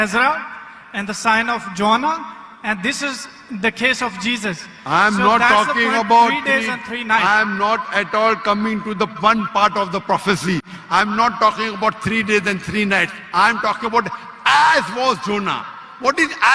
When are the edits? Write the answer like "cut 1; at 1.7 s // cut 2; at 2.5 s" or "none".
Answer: none